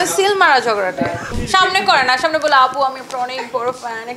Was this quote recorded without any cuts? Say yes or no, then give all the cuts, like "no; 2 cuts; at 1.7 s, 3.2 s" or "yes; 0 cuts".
no; 1 cut; at 1.3 s